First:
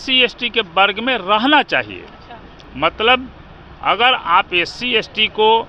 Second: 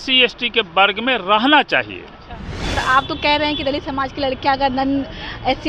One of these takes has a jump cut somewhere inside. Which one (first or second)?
second